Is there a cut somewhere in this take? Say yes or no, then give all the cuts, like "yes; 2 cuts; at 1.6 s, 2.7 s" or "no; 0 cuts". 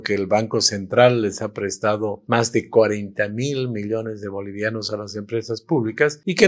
no; 0 cuts